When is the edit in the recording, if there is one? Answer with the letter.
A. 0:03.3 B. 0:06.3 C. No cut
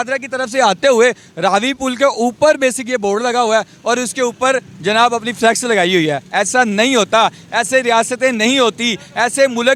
C